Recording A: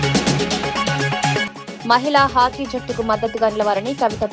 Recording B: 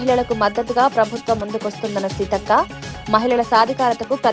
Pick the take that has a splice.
A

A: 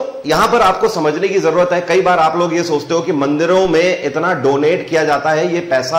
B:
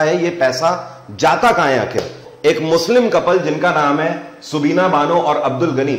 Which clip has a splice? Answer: B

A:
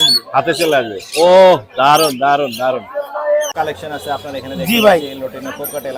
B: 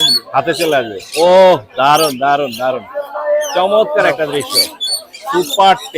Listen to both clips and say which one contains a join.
A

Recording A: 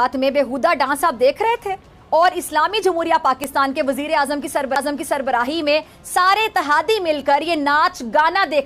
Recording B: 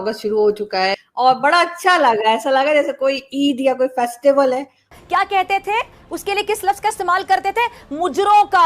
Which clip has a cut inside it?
B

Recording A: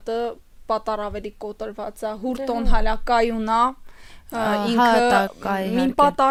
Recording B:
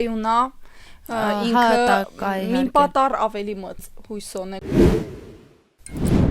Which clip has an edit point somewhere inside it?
B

